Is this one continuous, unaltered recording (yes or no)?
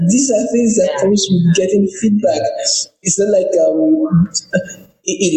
yes